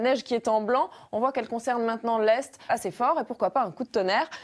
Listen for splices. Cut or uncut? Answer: uncut